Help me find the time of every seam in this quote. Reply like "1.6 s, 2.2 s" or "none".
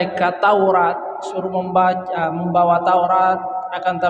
none